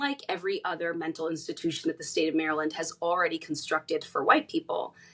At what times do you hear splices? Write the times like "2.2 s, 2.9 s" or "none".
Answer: none